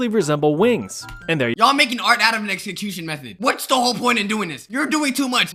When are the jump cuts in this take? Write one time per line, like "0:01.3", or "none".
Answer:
none